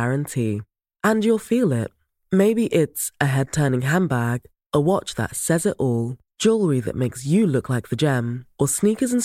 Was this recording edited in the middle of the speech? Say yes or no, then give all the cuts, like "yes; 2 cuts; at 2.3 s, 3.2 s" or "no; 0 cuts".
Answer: no; 0 cuts